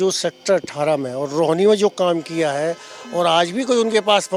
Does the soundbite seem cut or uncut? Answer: uncut